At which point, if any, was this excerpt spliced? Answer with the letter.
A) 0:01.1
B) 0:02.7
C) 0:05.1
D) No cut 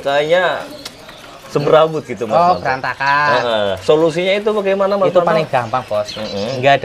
D